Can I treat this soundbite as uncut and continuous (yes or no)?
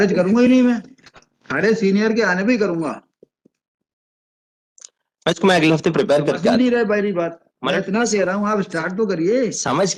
yes